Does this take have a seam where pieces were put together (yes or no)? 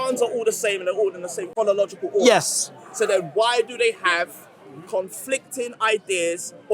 yes